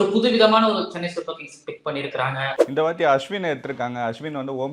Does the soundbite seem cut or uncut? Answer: cut